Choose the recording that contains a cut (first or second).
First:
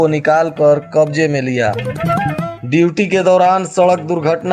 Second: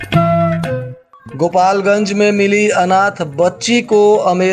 second